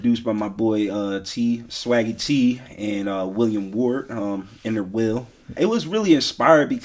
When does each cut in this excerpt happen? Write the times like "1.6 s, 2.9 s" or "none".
5.5 s